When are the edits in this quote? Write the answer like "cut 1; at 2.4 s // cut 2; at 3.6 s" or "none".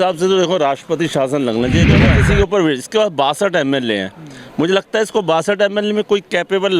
cut 1; at 2.0 s